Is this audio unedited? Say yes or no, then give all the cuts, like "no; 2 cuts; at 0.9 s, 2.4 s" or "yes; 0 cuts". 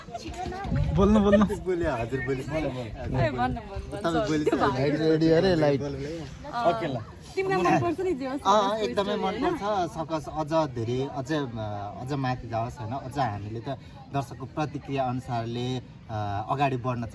yes; 0 cuts